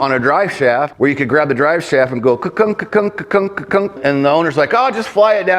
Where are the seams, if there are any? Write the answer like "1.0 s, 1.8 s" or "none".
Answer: 0.9 s, 4.0 s